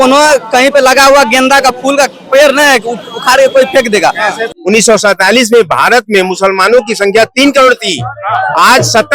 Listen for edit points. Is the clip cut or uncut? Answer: cut